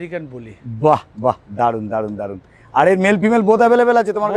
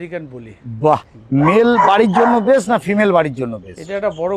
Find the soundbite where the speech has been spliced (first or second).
second